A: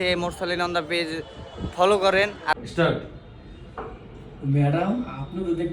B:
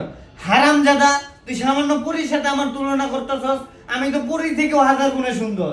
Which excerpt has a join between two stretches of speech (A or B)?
A